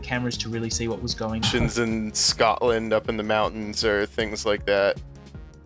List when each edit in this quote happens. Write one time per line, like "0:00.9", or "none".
none